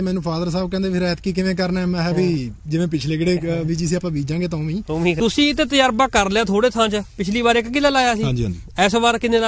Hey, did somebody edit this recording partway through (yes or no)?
yes